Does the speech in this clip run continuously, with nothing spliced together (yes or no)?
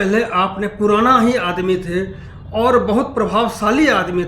yes